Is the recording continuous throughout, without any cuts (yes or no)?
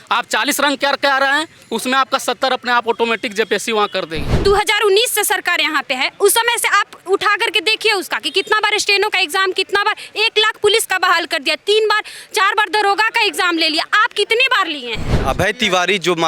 no